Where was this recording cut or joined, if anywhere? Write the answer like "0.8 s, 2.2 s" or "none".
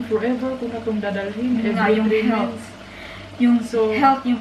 none